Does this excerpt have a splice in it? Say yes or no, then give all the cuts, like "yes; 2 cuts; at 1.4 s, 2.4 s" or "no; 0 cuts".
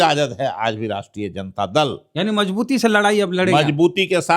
yes; 1 cut; at 2.0 s